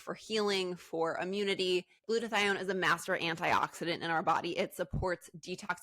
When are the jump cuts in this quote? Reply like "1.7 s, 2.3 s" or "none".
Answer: 2.0 s